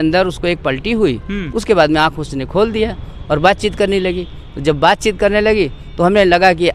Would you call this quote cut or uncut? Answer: uncut